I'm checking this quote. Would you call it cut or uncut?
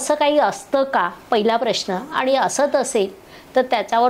uncut